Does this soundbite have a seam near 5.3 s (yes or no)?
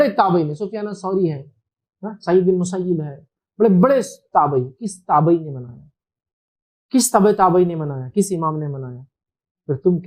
no